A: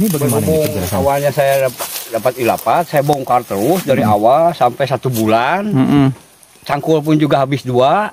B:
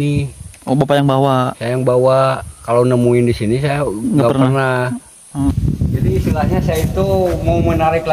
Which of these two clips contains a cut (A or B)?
B